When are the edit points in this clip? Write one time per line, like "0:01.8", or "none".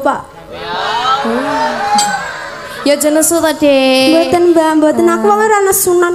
none